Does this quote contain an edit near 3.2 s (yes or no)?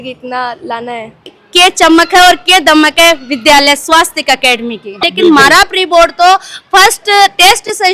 no